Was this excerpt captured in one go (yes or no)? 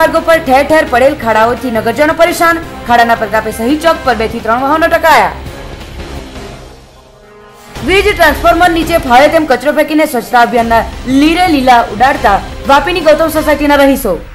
yes